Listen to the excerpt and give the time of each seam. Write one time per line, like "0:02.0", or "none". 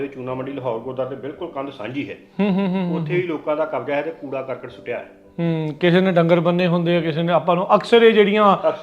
none